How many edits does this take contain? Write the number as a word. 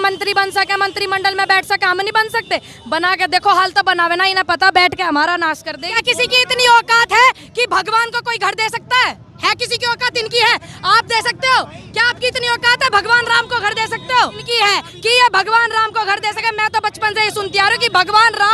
two